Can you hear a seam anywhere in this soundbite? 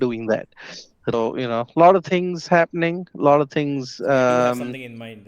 yes; 1 cut; at 1.1 s

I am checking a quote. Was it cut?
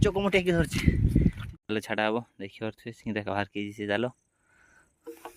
yes; 1 cut; at 1.4 s

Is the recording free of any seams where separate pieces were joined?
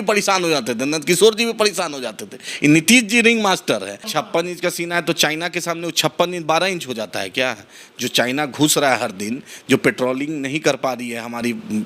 no; 1 cut; at 4.1 s

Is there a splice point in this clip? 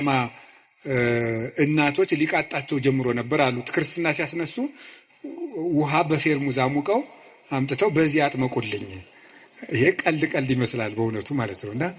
no; 0 cuts

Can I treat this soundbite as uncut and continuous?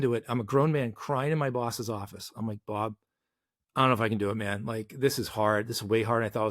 yes; 0 cuts

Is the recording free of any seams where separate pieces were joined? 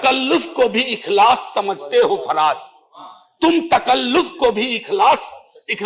yes; 0 cuts

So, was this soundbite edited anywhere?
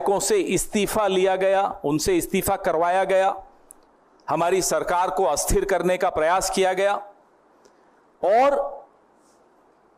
no; 0 cuts

